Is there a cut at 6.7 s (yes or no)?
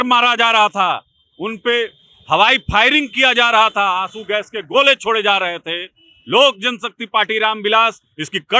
no